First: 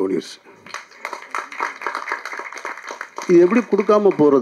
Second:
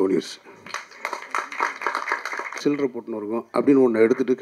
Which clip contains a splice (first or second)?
second